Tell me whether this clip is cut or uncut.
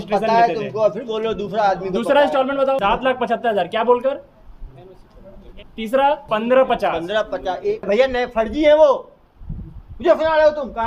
cut